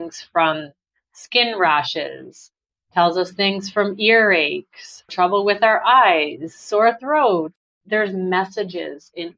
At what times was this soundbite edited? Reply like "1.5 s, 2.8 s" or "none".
none